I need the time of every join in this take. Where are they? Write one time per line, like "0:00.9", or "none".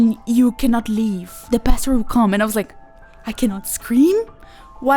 0:01.3